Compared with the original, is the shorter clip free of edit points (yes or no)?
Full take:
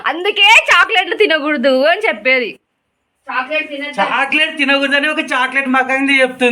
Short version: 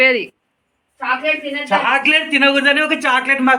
yes